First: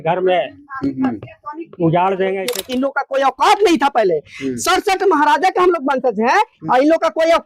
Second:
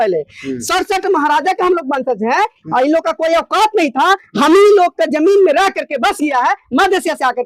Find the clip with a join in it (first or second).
first